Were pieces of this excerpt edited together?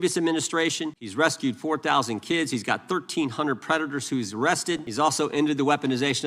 yes; 2 cuts; at 1.0 s, 4.9 s

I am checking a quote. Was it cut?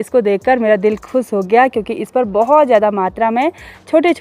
no; 0 cuts

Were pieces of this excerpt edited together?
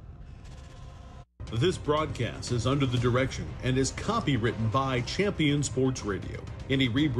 yes; 1 cut; at 1.3 s

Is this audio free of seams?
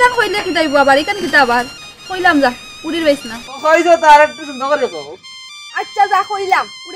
yes; 0 cuts

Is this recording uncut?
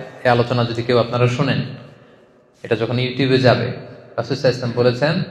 yes; 0 cuts

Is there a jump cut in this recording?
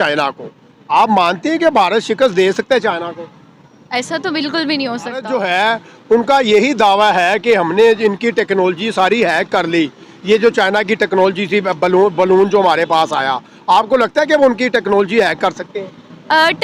yes; 1 cut; at 5.3 s

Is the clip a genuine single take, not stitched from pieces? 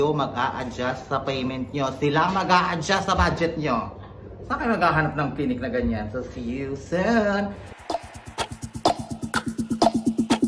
no; 1 cut; at 7.7 s

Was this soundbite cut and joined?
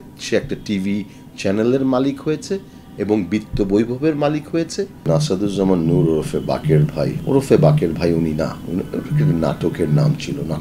yes; 2 cuts; at 5.1 s, 7.2 s

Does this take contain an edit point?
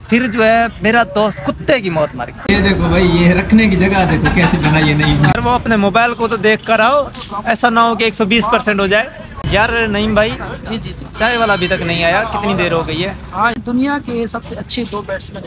yes; 4 cuts; at 2.3 s, 5.4 s, 9.5 s, 13.6 s

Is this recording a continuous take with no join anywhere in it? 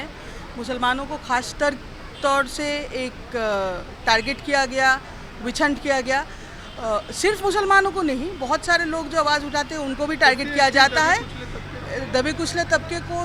yes; 0 cuts

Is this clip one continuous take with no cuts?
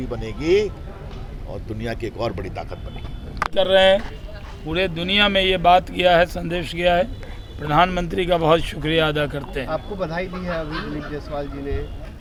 yes; 0 cuts

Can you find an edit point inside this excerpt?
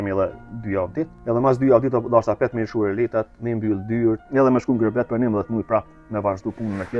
yes; 2 cuts; at 1.2 s, 4.2 s

